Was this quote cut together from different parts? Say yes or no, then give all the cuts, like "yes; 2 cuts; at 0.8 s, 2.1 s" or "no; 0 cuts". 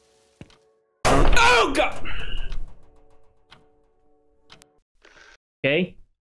yes; 1 cut; at 4.8 s